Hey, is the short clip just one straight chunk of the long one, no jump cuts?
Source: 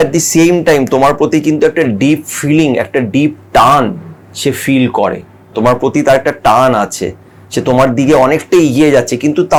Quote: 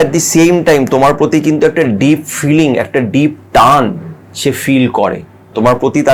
yes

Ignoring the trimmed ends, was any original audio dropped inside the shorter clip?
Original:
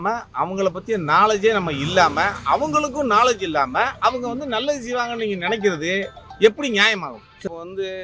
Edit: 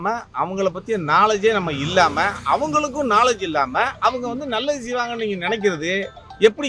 no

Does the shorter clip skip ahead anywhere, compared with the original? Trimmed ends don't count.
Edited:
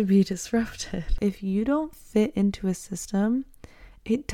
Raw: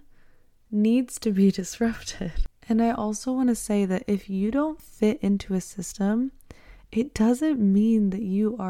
yes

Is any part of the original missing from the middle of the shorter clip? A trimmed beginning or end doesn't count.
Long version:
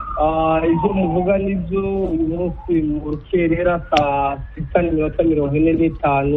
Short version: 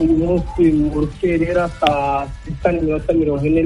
no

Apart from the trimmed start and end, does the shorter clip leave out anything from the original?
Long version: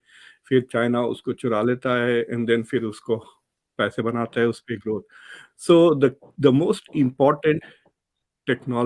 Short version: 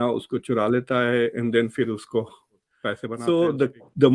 yes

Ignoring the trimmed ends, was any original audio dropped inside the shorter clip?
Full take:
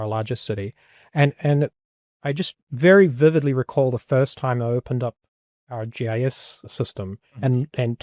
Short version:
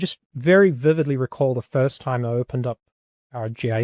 no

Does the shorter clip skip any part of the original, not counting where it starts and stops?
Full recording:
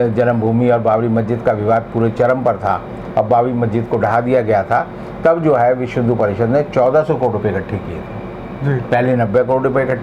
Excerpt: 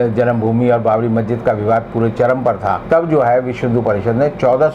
yes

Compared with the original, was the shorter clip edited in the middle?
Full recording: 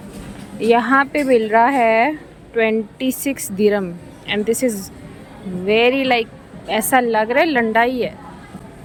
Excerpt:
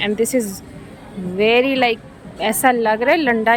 no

